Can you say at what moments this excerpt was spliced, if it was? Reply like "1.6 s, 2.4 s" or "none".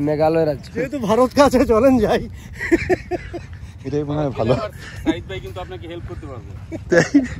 1.0 s